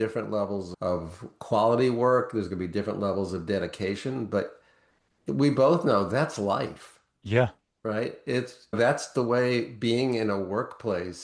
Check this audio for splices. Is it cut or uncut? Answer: uncut